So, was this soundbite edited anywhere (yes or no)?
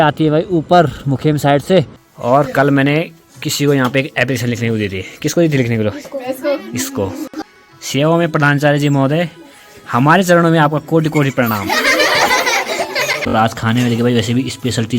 yes